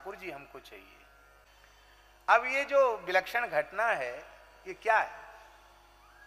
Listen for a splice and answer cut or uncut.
cut